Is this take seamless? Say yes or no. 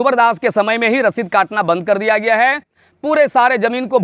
yes